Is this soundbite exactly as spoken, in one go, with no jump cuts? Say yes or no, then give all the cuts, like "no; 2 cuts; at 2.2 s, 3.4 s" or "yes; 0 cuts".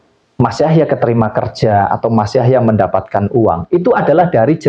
yes; 0 cuts